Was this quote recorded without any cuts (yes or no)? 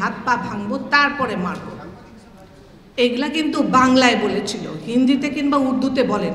yes